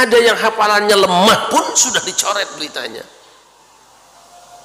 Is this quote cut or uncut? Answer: uncut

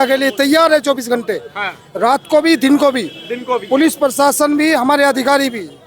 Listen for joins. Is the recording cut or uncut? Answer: uncut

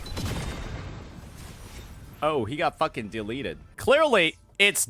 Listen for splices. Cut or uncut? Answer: cut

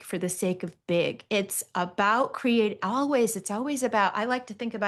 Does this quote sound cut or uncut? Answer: uncut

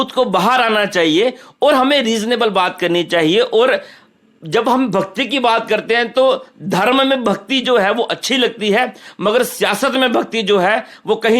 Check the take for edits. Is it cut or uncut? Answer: uncut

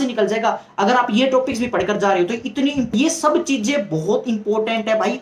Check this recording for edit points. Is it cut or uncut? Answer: cut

